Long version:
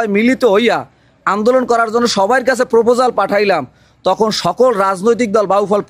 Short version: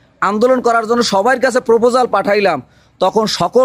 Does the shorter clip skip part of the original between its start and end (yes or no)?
no